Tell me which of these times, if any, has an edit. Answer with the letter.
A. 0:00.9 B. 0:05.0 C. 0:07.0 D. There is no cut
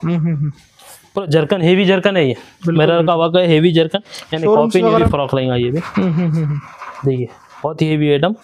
B